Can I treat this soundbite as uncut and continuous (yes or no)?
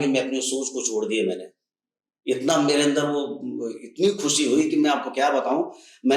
yes